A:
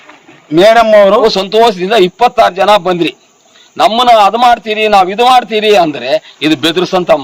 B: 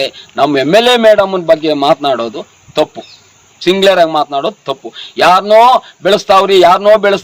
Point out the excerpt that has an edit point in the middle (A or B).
A